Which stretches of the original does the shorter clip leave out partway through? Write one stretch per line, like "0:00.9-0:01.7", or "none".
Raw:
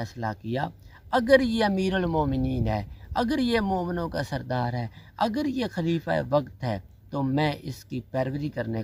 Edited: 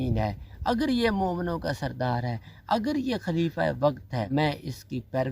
0:06.8-0:07.3